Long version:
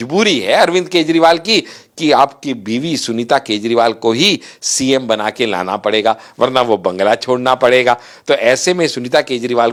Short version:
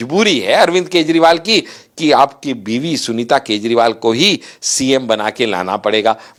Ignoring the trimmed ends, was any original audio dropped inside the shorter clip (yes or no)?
no